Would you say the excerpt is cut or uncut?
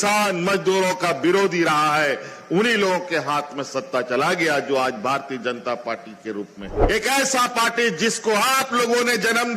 cut